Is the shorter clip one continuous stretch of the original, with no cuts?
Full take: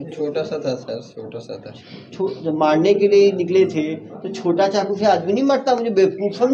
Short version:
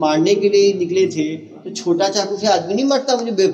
yes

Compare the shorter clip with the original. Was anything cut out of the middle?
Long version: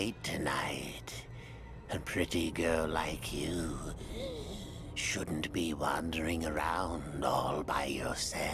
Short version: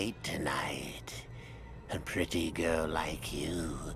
no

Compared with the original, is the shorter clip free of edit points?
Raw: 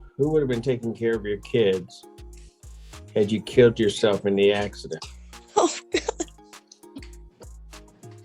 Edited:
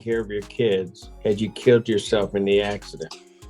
no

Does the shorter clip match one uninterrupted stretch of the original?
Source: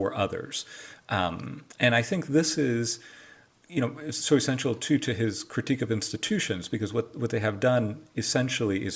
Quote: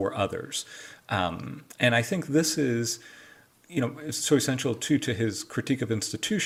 yes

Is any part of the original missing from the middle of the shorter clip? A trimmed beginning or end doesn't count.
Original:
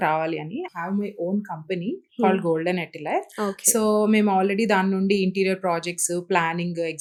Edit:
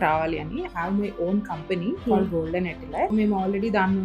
yes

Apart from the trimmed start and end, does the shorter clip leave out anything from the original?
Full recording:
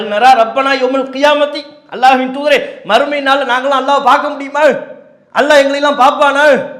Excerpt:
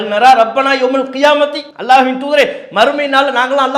yes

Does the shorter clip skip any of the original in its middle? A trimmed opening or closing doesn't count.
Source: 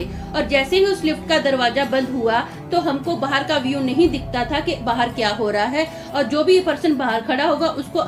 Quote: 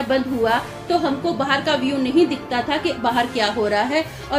no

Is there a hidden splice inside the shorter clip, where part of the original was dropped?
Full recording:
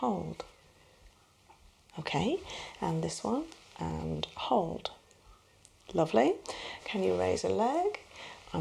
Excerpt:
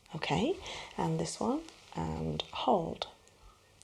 no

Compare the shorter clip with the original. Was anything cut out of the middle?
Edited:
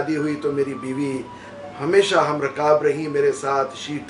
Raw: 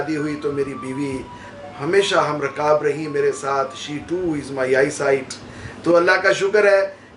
no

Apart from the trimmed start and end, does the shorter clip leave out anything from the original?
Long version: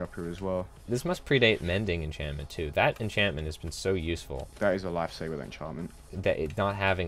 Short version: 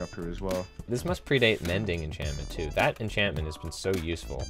no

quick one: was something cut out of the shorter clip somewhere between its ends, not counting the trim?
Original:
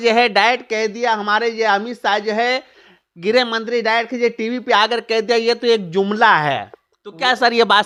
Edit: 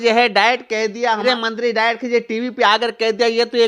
yes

